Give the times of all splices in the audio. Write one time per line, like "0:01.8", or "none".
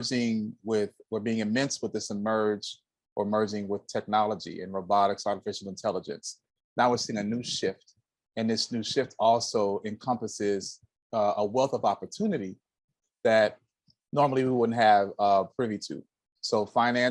0:06.5